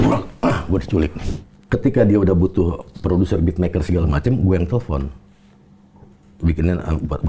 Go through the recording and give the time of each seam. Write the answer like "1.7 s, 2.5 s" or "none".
1.2 s